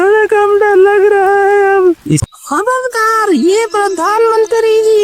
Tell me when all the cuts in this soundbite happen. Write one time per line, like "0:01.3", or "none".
0:02.2